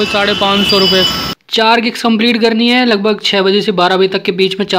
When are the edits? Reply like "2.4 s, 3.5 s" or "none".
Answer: 1.2 s